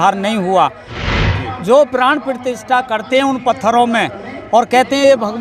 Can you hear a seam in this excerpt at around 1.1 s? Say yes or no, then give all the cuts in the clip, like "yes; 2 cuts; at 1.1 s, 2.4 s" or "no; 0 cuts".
yes; 1 cut; at 1.1 s